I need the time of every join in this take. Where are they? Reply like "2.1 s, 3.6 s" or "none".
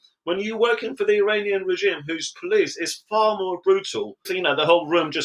4.3 s

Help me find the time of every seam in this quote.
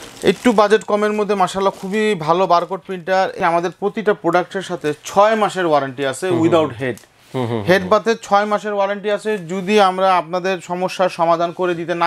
3.4 s

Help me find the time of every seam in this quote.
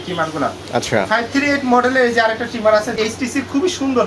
2.9 s

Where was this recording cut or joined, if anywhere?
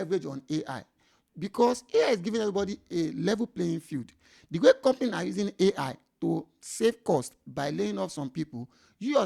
none

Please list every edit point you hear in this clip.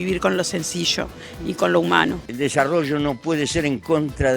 2.1 s

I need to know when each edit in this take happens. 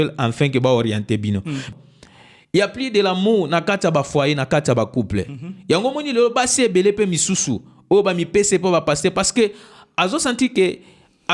1.7 s

